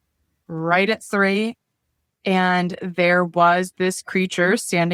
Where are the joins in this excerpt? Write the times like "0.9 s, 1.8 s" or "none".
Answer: none